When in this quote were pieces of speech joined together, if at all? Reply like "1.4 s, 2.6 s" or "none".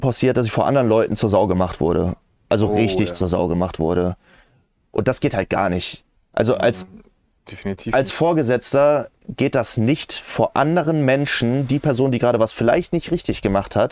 none